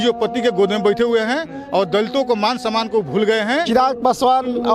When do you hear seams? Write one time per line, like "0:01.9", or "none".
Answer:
0:03.7

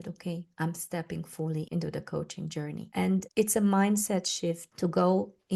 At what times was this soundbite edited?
0:01.7
0:03.2
0:04.7

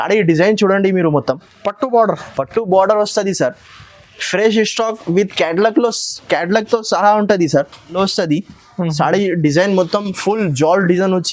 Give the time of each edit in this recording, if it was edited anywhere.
0:08.0

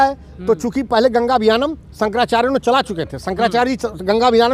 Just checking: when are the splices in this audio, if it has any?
none

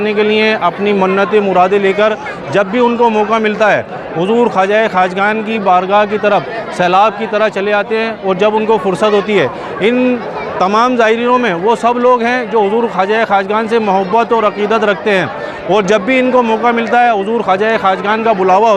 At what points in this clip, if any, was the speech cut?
none

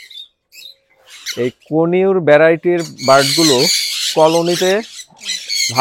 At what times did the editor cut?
0:01.2

